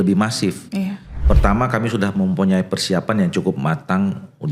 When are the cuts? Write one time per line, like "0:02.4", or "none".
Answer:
0:01.2